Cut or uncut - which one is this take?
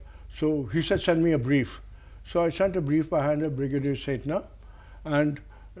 uncut